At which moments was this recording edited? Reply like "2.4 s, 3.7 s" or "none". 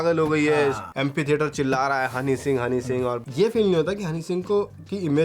0.9 s, 3.2 s